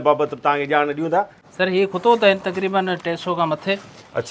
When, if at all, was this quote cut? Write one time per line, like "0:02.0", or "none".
0:01.4